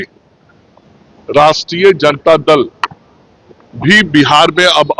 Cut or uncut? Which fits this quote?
uncut